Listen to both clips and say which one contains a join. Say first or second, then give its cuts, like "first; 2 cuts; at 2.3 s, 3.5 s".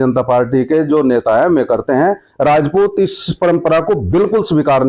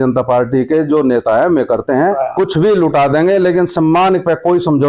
second; 1 cut; at 2.2 s